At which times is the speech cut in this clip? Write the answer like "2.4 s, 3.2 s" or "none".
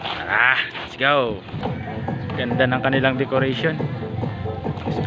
1.6 s